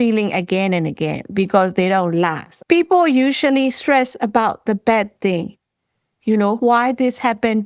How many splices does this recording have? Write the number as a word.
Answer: one